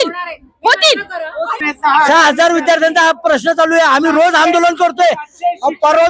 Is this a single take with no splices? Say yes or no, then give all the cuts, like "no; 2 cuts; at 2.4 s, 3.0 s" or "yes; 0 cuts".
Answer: no; 1 cut; at 1.6 s